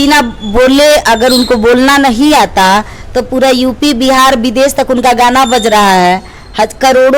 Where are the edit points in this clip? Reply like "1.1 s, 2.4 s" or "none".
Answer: none